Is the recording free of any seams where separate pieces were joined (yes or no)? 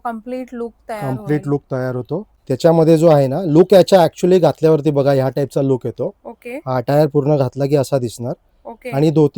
no